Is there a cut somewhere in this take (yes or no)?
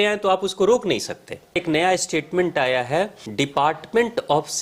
yes